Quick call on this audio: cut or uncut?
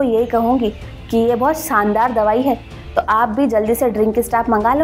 uncut